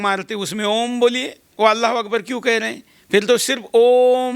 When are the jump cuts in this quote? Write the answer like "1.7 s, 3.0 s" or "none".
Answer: 1.4 s